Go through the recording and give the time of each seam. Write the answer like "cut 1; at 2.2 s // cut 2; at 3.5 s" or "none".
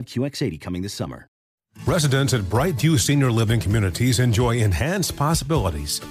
cut 1; at 1.4 s